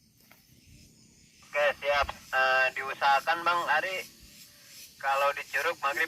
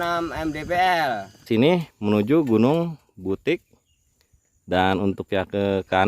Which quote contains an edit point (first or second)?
second